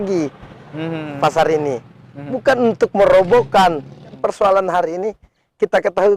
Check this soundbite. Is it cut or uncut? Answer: cut